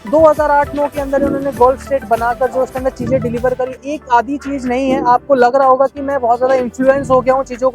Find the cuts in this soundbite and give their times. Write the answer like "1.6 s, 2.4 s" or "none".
3.7 s